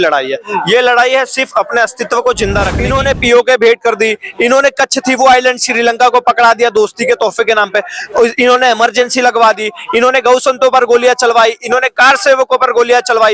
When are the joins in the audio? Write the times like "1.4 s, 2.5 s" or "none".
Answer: 2.8 s